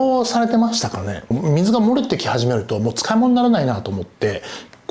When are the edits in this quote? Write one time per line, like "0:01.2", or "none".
0:01.3